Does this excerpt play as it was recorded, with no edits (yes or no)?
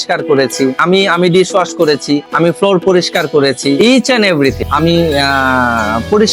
no